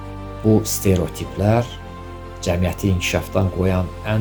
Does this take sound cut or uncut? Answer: uncut